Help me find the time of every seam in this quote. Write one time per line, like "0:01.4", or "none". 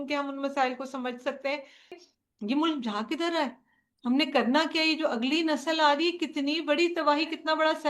0:02.0